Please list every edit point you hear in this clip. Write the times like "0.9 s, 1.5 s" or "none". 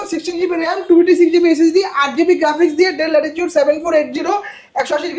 none